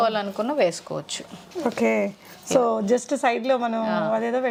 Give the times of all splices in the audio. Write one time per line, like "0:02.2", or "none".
none